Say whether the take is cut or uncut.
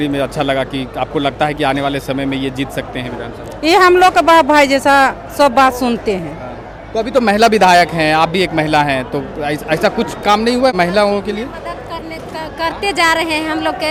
uncut